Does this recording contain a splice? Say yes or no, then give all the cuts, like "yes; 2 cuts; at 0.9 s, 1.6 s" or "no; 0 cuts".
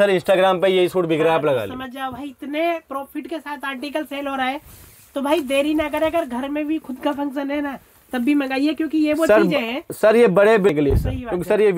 yes; 1 cut; at 10.7 s